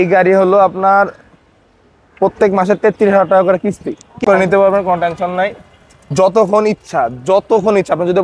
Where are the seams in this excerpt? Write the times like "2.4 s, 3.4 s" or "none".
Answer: 4.2 s